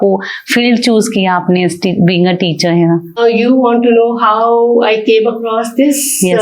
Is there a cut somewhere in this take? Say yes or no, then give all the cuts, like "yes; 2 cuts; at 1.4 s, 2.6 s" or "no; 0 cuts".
yes; 1 cut; at 3.2 s